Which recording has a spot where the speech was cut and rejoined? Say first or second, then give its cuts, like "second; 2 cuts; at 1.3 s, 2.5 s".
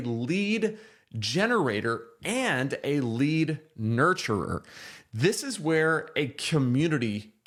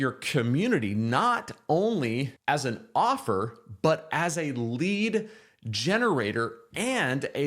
second; 1 cut; at 2.3 s